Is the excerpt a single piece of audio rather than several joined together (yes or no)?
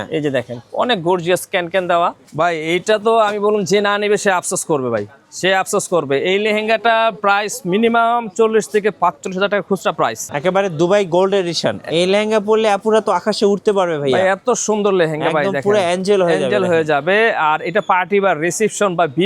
no